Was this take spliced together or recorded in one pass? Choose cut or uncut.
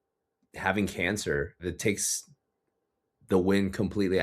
cut